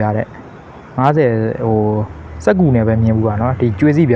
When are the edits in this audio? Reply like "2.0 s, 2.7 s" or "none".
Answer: none